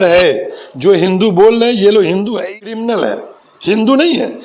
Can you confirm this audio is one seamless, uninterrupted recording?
no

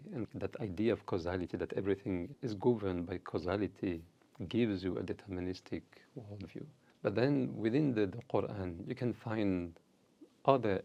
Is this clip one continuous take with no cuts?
yes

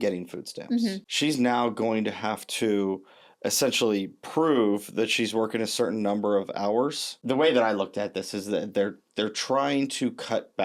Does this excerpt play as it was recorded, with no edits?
no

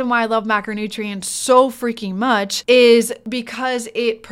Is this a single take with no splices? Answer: no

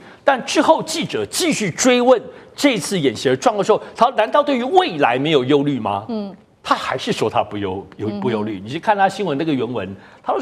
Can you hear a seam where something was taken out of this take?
no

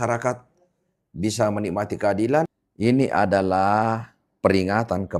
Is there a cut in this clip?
yes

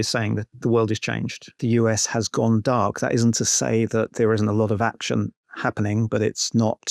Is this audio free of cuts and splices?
no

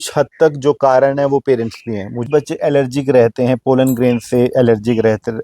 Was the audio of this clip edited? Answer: yes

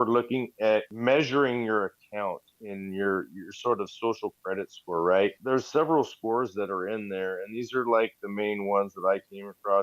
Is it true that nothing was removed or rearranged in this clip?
no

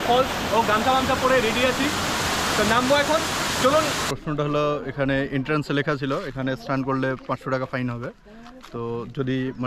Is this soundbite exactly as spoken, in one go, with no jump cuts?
no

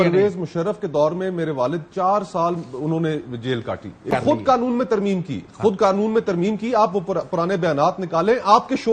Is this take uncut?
no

